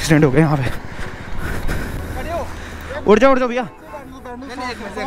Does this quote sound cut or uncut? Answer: cut